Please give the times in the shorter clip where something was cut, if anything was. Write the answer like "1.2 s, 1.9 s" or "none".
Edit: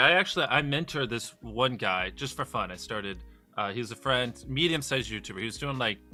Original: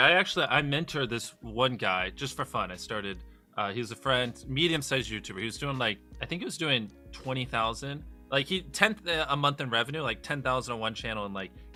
none